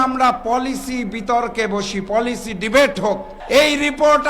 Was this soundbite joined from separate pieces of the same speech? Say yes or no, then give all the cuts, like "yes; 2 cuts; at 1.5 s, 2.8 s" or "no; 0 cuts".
yes; 1 cut; at 3.3 s